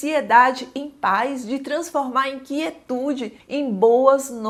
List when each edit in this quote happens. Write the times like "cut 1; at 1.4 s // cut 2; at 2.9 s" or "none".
none